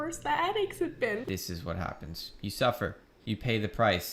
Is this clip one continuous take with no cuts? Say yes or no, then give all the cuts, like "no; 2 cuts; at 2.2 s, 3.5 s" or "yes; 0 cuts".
no; 2 cuts; at 1.2 s, 3.1 s